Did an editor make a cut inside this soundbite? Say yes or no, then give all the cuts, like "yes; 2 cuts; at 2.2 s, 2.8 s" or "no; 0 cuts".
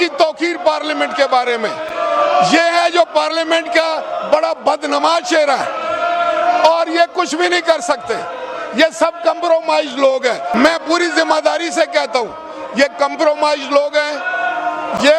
no; 0 cuts